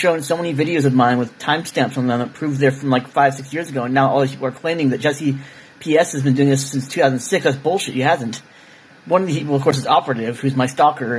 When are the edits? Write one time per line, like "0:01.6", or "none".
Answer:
0:07.6